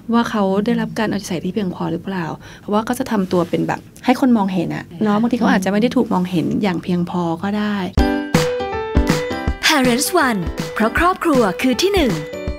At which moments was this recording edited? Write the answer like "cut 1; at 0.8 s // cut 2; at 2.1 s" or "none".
cut 1; at 2.5 s // cut 2; at 3.9 s // cut 3; at 4.8 s // cut 4; at 7.9 s